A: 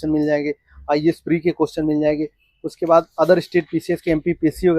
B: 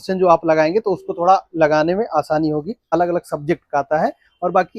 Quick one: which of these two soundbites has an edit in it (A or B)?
B